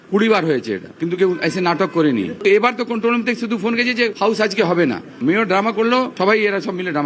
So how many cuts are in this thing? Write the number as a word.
two